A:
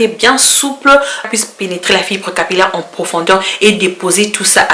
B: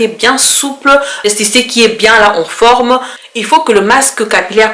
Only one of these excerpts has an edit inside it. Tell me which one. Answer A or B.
A